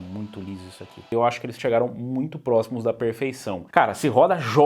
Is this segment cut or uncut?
cut